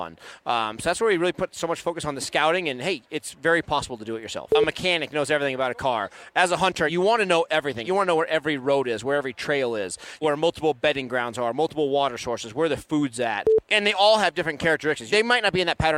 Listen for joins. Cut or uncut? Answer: cut